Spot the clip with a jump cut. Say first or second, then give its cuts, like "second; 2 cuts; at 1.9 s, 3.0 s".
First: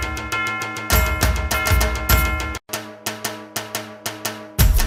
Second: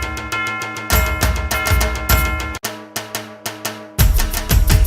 second; 1 cut; at 2.6 s